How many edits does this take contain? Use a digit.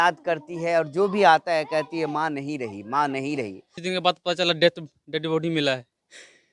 1